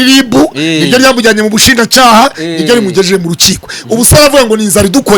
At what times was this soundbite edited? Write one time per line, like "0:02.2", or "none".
none